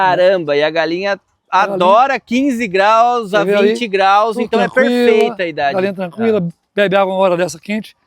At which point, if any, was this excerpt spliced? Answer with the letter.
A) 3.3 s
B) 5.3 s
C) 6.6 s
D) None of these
D